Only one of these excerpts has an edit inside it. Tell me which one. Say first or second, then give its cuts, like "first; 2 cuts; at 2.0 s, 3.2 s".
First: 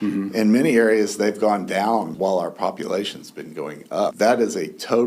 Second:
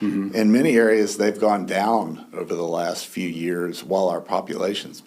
first; 2 cuts; at 2.1 s, 4.1 s